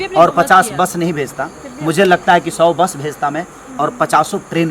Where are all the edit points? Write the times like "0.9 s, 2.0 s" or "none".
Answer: none